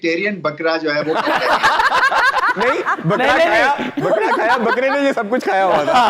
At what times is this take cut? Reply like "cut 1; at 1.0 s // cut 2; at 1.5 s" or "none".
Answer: none